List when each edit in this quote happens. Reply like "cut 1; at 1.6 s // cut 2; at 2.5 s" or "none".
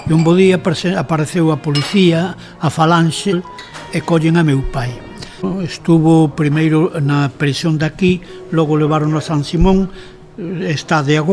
cut 1; at 3.3 s // cut 2; at 5.5 s